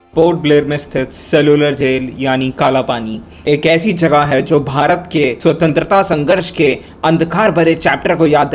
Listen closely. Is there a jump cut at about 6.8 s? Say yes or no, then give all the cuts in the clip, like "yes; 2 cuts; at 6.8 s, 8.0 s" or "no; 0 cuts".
no; 0 cuts